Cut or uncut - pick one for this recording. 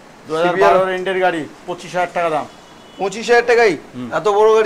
uncut